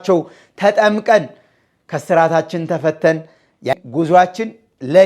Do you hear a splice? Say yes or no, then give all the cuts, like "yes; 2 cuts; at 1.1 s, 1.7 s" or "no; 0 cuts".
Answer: yes; 1 cut; at 3.7 s